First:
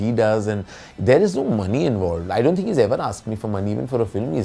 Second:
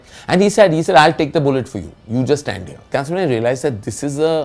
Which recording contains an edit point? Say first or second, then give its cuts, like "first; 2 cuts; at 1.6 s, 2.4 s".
second; 1 cut; at 2.9 s